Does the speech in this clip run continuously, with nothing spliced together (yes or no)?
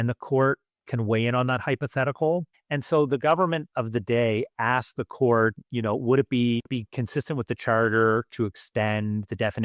yes